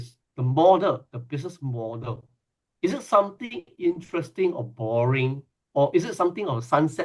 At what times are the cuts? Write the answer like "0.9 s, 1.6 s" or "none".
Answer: none

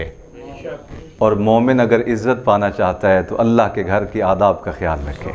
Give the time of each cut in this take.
none

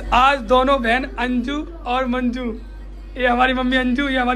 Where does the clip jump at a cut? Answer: none

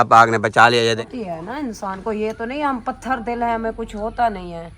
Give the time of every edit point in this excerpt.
1.0 s

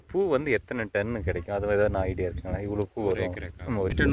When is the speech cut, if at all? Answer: none

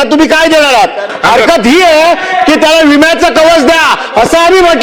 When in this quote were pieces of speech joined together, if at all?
1.0 s

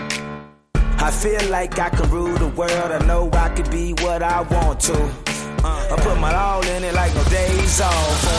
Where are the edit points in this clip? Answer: none

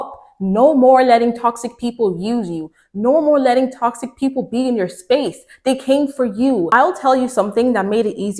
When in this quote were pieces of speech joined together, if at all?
6.7 s

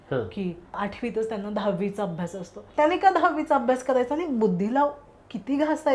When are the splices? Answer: 0.8 s, 2.7 s

